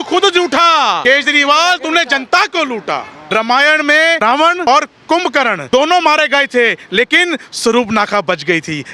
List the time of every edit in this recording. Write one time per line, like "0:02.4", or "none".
0:01.0
0:03.2
0:04.4
0:05.6